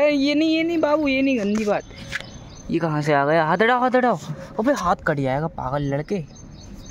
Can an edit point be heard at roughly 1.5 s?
no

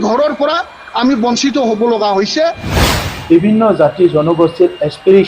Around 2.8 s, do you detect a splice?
yes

